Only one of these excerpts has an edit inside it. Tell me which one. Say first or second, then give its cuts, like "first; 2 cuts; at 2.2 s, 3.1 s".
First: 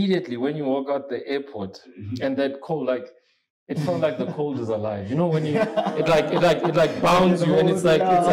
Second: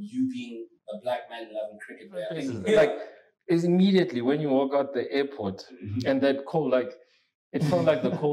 second; 1 cut; at 2.5 s